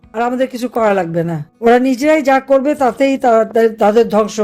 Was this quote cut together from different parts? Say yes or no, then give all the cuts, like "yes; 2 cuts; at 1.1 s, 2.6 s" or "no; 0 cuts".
yes; 1 cut; at 1.4 s